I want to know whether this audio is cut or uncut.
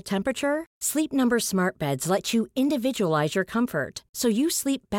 uncut